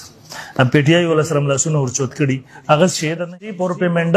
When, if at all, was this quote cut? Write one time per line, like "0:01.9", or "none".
0:03.2